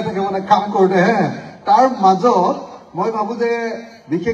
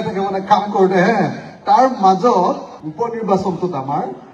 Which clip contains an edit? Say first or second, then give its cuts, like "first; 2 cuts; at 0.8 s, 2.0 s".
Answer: second; 1 cut; at 2.8 s